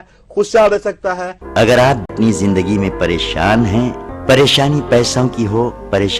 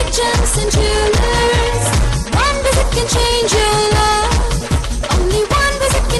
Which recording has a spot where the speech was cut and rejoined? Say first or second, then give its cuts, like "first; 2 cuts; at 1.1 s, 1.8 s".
first; 2 cuts; at 1.2 s, 2.1 s